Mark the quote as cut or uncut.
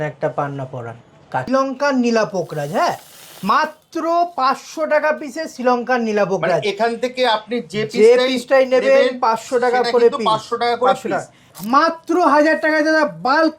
cut